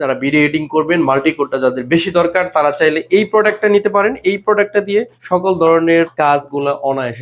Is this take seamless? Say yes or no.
no